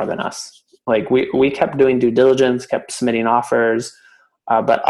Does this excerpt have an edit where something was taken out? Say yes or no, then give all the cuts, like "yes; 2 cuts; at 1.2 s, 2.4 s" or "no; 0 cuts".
no; 0 cuts